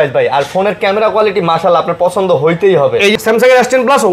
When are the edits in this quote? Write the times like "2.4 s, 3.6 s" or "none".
3.1 s

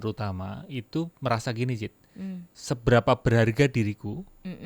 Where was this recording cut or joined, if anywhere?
2.5 s

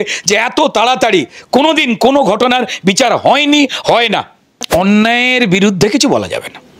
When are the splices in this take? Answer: 4.7 s

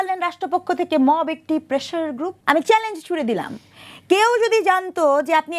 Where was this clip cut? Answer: 2.4 s

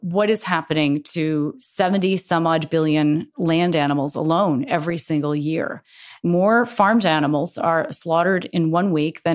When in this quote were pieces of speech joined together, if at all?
1.6 s, 3.3 s, 6.2 s

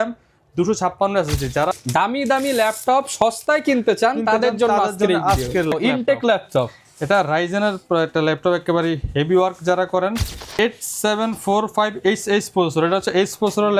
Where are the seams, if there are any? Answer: 1.7 s, 5.7 s, 10.6 s

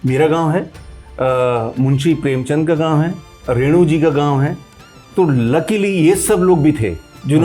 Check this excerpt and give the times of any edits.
none

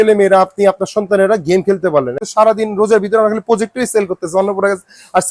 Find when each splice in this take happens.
2.2 s

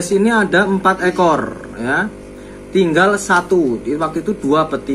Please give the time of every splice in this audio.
none

